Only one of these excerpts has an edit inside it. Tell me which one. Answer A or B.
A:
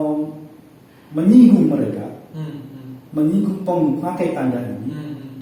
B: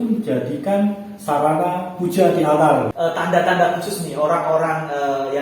B